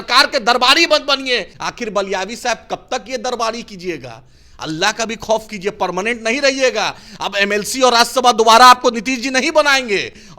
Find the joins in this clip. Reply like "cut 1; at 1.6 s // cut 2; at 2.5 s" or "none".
cut 1; at 1.5 s